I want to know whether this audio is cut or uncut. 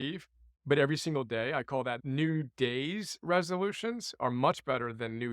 cut